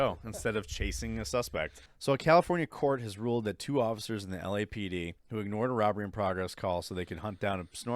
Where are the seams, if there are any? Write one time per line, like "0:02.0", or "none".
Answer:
0:01.8
0:05.2